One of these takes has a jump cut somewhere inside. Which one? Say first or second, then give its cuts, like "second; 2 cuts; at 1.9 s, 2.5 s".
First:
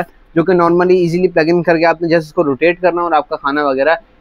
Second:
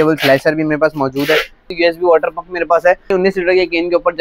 second; 2 cuts; at 1.7 s, 3.1 s